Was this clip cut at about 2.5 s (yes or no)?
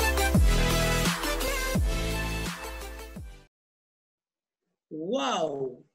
no